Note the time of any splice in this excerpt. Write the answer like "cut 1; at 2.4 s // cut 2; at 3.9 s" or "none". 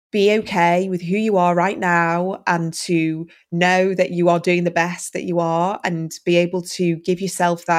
none